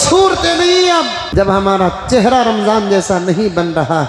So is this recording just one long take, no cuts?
no; 1 cut; at 1.2 s

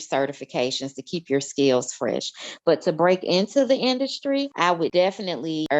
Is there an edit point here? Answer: yes; 1 cut; at 4.8 s

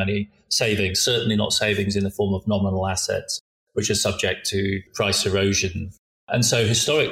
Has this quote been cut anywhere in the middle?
yes; 2 cuts; at 4.9 s, 6.3 s

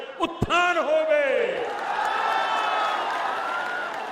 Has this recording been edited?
no; 0 cuts

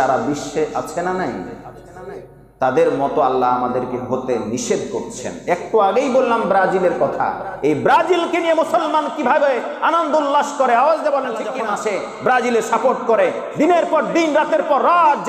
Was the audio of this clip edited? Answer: yes; 1 cut; at 11.6 s

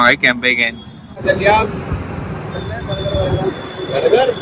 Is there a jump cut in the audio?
yes; 1 cut; at 1.2 s

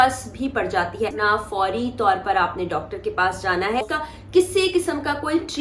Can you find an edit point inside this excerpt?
yes; 2 cuts; at 1.2 s, 3.9 s

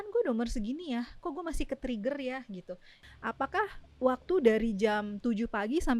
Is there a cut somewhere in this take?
yes; 1 cut; at 2.9 s

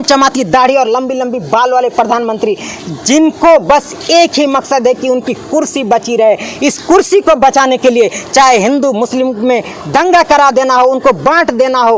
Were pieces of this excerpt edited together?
no; 0 cuts

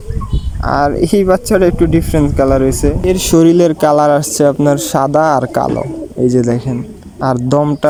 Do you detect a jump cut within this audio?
no; 0 cuts

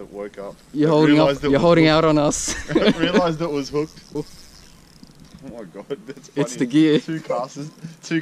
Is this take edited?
yes; 1 cut; at 4.2 s

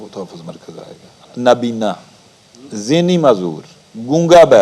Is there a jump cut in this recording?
yes; 1 cut; at 1.2 s

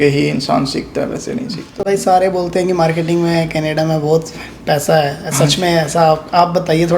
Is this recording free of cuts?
no; 1 cut; at 1.7 s

